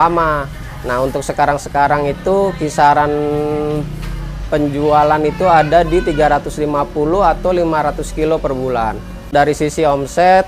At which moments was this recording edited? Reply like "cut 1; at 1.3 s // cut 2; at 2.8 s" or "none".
cut 1; at 9.3 s